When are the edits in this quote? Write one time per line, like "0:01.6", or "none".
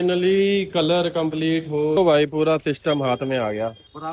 0:02.0